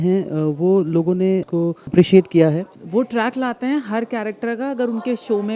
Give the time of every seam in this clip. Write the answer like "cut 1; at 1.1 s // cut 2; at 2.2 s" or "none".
cut 1; at 2.7 s